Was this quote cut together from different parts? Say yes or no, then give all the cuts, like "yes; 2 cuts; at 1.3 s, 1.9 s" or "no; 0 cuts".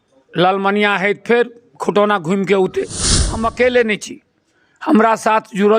yes; 1 cut; at 3.2 s